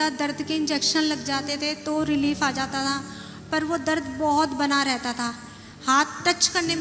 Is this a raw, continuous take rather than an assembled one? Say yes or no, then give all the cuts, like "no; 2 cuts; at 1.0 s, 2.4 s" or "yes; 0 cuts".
yes; 0 cuts